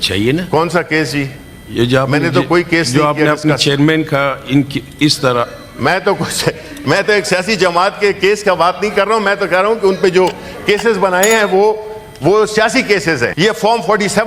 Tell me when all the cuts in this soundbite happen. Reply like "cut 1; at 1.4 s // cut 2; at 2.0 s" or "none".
cut 1; at 13.3 s